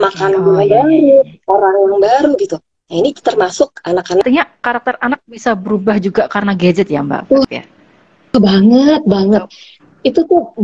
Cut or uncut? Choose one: cut